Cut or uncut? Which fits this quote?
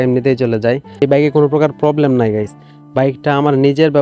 cut